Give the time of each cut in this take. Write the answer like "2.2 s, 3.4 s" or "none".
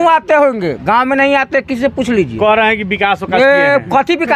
none